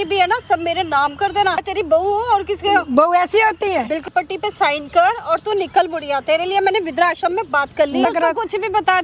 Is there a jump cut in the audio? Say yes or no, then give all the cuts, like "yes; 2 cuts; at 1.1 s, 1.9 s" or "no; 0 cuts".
yes; 3 cuts; at 1.6 s, 4.1 s, 8.0 s